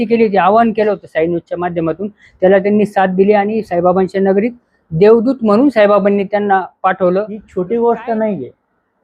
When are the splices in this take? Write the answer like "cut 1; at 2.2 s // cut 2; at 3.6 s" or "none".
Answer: cut 1; at 7.4 s